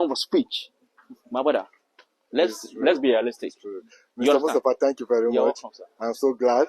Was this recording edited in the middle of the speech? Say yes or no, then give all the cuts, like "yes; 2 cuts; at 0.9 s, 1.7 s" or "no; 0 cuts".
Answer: no; 0 cuts